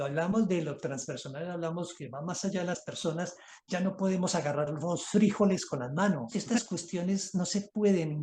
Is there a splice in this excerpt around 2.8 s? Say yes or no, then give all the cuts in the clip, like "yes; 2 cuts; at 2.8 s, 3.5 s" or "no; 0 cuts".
yes; 2 cuts; at 2.8 s, 6.3 s